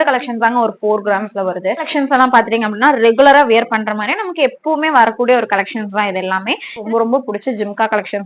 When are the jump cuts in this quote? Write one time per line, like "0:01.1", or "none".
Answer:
0:01.9
0:06.8